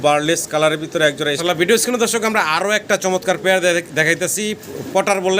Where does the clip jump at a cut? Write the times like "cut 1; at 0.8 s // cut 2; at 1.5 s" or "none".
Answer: cut 1; at 1.4 s